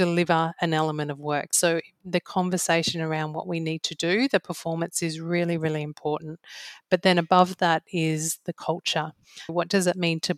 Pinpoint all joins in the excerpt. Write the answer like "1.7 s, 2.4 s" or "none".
1.5 s, 9.5 s